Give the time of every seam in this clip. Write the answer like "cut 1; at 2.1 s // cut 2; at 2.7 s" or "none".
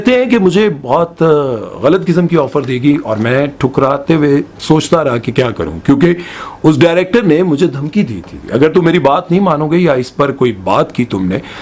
none